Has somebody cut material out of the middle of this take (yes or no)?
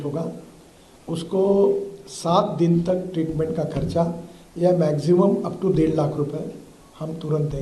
no